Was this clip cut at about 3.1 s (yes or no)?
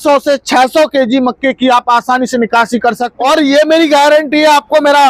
yes